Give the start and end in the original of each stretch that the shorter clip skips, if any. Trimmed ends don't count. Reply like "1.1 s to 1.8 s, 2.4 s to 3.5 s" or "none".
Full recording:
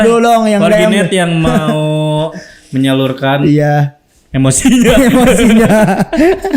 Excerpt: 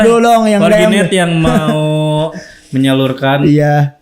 none

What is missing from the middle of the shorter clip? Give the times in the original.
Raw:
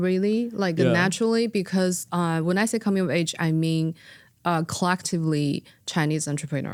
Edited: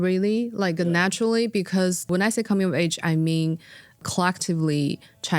2.1 s to 2.4 s, 4.4 s to 4.7 s

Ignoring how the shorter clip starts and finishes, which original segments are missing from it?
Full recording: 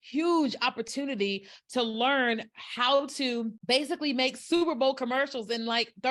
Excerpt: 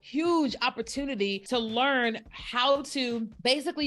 1.4 s to 1.6 s

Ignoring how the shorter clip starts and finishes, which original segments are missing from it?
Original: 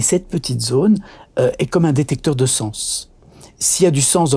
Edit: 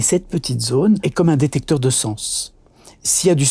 1.1 s to 1.6 s

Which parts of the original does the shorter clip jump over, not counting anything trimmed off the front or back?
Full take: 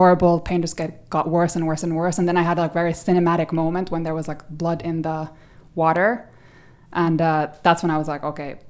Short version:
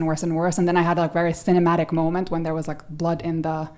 none

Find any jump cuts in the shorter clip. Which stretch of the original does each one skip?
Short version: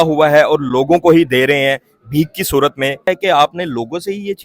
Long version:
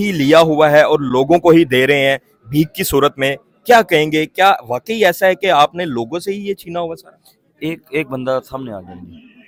3.5 s to 5.3 s

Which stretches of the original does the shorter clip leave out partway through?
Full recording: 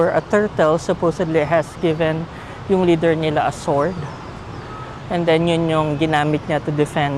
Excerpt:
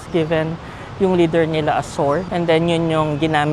4.0 s to 5.1 s

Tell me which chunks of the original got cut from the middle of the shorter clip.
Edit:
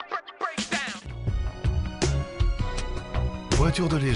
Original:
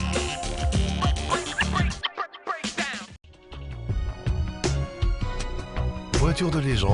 3.1 s to 3.7 s

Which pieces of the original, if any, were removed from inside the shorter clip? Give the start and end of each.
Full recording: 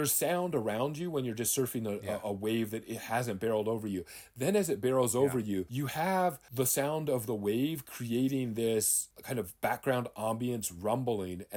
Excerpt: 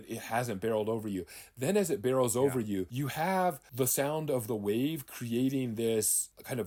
none

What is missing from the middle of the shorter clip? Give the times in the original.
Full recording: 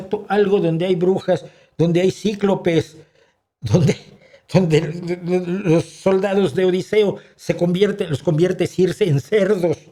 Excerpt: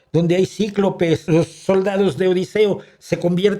2.9 s to 5.6 s

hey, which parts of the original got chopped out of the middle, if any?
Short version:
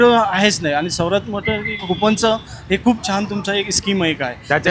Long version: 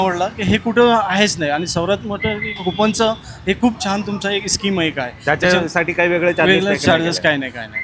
none

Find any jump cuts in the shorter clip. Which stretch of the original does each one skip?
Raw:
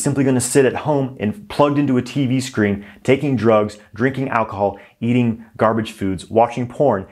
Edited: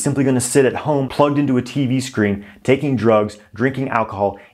1.1 s to 1.5 s

